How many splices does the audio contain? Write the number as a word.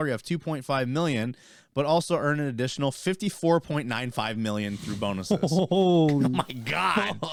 zero